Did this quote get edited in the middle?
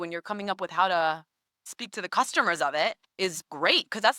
yes; 1 cut; at 1.7 s

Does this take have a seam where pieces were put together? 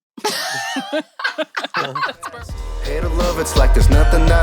yes; 1 cut; at 2.5 s

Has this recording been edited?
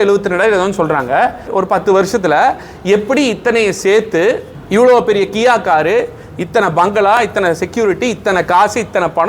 yes; 2 cuts; at 1.5 s, 4.5 s

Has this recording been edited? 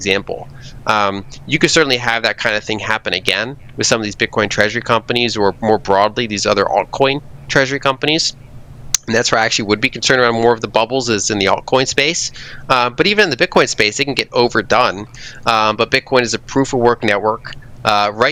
no; 0 cuts

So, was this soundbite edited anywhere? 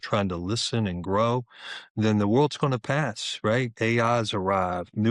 no; 0 cuts

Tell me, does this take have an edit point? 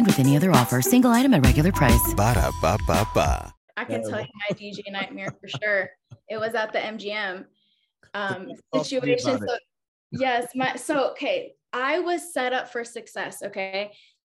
yes; 1 cut; at 3.7 s

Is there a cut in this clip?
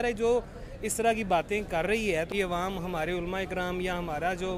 yes; 1 cut; at 2.3 s

